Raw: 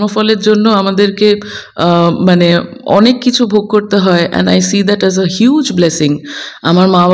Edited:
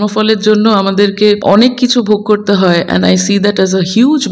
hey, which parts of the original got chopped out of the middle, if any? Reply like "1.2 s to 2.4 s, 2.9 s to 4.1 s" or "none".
1.4 s to 2.8 s